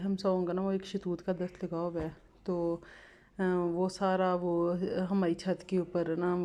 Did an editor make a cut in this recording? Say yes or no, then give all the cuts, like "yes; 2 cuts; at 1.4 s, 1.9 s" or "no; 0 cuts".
no; 0 cuts